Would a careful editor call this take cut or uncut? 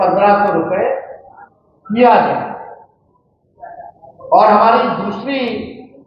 uncut